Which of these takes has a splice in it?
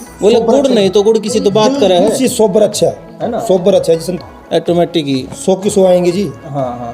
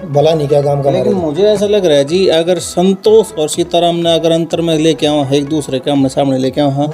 first; 1 cut; at 4.1 s

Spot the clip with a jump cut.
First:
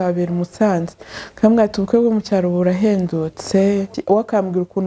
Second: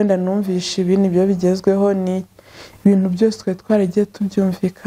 first; 1 cut; at 3.9 s

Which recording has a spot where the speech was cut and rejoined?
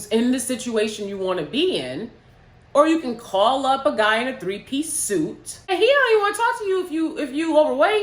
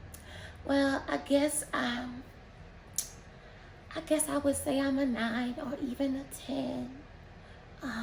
first; 1 cut; at 5.7 s

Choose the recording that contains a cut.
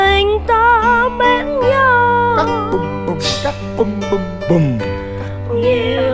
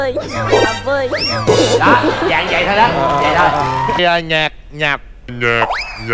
second; 1 cut; at 4.0 s

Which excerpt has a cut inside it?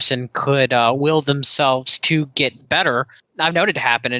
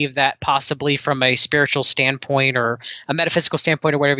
first; 1 cut; at 3.2 s

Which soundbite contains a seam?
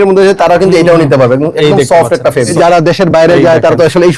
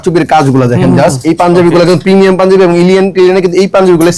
first; 1 cut; at 2.5 s

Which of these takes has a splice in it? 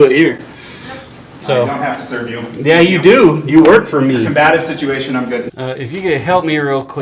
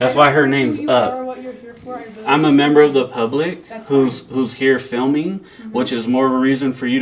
first; 2 cuts; at 1.3 s, 5.5 s

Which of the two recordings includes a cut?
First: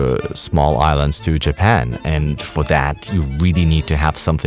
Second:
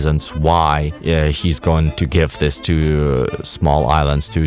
second; 2 cuts; at 0.9 s, 1.9 s

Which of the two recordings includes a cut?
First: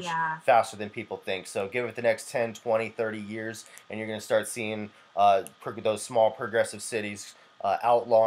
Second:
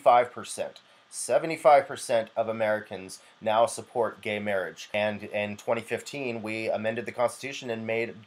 second; 1 cut; at 4.9 s

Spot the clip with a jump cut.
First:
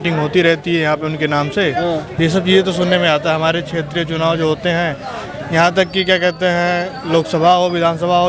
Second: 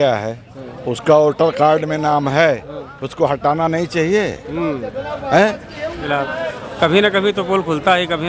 second; 1 cut; at 6.3 s

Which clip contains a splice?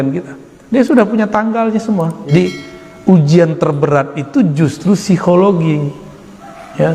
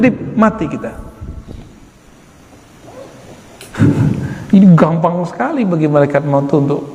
first; 1 cut; at 2.3 s

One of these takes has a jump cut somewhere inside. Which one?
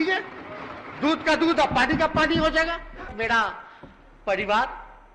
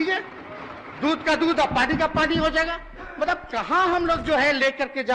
first; 1 cut; at 3.1 s

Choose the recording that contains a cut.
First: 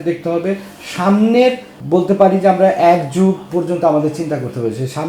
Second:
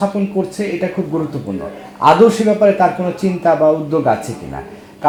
first; 1 cut; at 1.7 s

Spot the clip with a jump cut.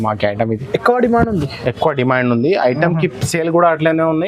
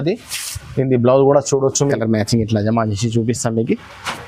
second; 1 cut; at 1.8 s

